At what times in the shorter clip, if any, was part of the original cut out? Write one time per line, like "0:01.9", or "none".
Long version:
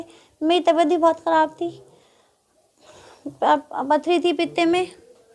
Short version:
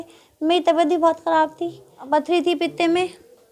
0:02.0